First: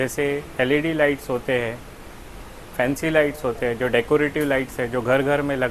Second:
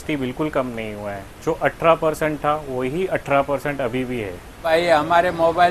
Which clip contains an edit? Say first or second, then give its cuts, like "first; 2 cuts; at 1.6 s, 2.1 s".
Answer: second; 1 cut; at 4.6 s